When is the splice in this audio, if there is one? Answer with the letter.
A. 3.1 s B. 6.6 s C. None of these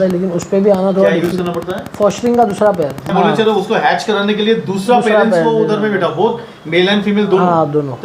A